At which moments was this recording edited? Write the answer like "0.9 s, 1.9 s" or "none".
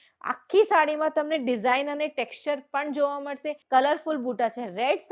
3.6 s